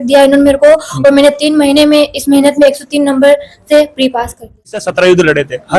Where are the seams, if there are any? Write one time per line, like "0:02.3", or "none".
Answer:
0:04.8